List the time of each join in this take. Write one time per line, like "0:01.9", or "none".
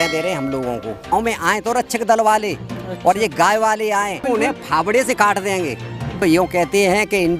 0:01.1
0:04.2
0:06.2